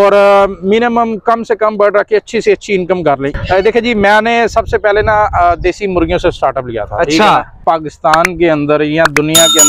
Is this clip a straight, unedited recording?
no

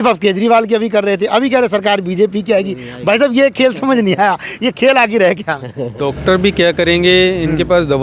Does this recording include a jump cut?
yes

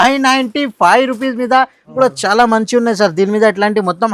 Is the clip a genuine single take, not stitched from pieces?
no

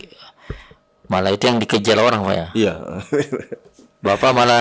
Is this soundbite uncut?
yes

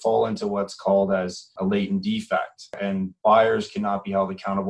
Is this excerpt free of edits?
no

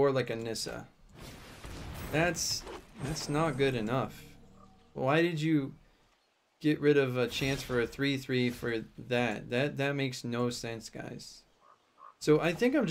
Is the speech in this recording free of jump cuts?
yes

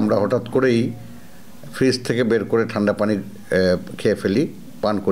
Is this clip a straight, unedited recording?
yes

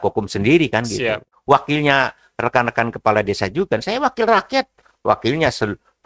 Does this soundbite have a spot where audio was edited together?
yes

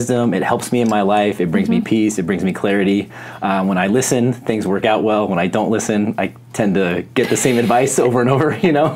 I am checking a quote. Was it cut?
no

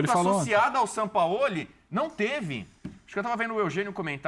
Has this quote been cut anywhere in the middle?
no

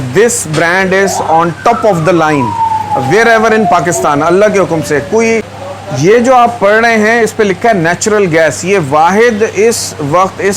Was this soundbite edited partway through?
yes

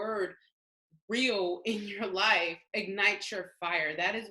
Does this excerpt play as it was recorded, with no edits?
no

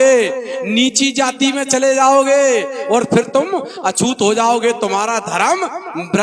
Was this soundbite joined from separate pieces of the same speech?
no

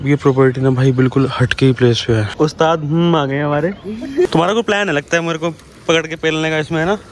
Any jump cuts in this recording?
yes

